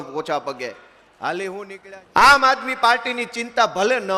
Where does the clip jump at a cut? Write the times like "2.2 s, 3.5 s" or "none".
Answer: 1.7 s